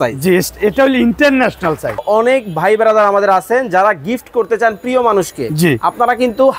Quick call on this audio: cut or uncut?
cut